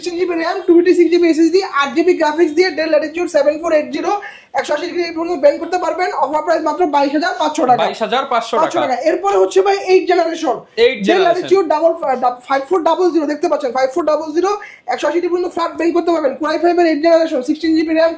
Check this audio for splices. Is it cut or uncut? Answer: uncut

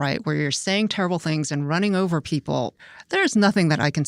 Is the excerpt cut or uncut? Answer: cut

